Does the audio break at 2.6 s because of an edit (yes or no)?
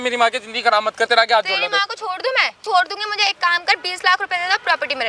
yes